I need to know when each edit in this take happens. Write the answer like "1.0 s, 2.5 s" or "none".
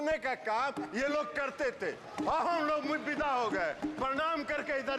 none